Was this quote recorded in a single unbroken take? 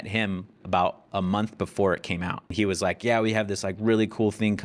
no; 1 cut; at 2.4 s

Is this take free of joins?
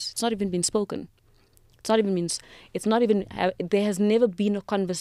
yes; 0 cuts

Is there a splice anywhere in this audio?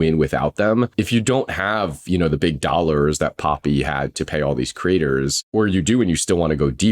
yes; 2 cuts; at 0.9 s, 5.4 s

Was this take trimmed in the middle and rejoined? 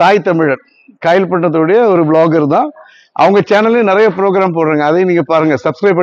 no; 0 cuts

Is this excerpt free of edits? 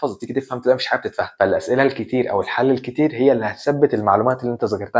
no; 1 cut; at 1.3 s

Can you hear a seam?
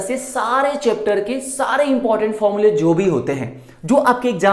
no; 0 cuts

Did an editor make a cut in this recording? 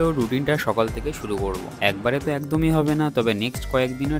no; 0 cuts

